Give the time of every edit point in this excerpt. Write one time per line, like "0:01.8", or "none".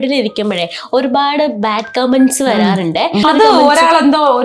0:03.2